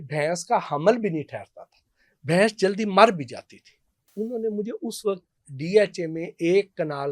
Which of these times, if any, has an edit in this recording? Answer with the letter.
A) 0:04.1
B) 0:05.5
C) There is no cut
A